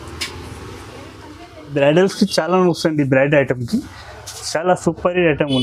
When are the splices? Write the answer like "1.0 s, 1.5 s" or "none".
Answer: 1.7 s